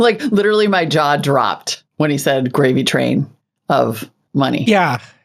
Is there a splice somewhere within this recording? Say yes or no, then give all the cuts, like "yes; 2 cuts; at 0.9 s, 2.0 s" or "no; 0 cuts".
no; 0 cuts